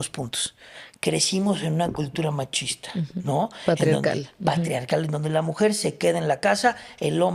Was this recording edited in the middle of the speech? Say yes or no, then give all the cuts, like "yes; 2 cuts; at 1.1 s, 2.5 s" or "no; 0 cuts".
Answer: no; 0 cuts